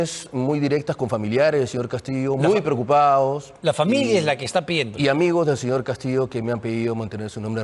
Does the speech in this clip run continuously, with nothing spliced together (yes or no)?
yes